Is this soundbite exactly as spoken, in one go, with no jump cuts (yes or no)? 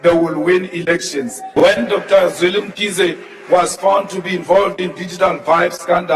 no